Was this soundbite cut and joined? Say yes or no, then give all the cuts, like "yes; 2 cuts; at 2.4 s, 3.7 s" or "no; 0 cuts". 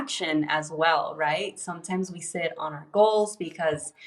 no; 0 cuts